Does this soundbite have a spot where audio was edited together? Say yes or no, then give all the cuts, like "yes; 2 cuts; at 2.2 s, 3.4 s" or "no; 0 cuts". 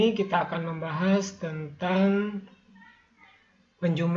no; 0 cuts